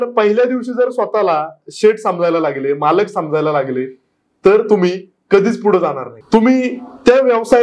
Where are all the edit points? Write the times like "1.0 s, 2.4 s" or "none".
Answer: 6.1 s